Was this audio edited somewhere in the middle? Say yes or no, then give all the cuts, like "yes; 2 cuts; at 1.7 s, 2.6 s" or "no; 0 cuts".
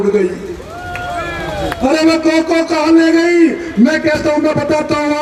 no; 0 cuts